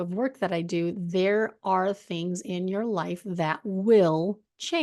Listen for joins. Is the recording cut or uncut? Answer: uncut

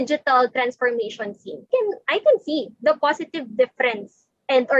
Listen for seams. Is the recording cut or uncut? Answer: cut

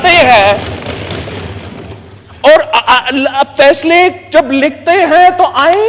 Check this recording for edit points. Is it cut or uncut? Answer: uncut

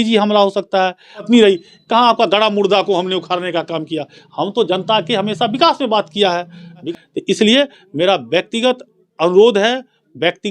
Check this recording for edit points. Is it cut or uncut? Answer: cut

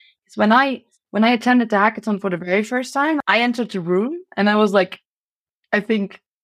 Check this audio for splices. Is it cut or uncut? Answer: cut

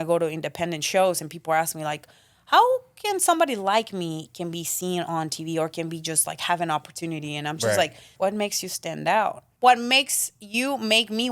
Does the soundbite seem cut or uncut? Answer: cut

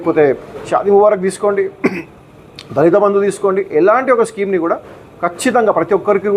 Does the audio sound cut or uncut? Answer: uncut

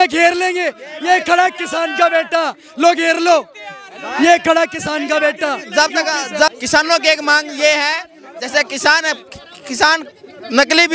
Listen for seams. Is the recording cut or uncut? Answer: uncut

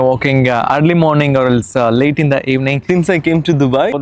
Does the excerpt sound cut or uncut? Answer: cut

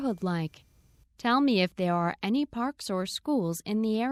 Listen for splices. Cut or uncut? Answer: uncut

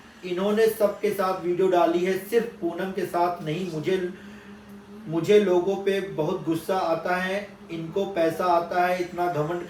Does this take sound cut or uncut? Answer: uncut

